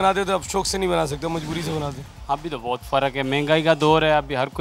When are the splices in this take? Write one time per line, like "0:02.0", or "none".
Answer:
none